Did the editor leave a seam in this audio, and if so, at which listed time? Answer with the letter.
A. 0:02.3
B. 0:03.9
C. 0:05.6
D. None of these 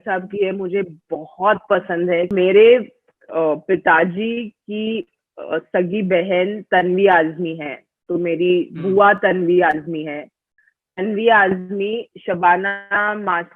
A